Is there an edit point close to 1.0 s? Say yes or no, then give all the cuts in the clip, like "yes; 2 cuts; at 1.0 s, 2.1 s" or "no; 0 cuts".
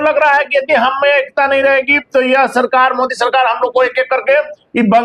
no; 0 cuts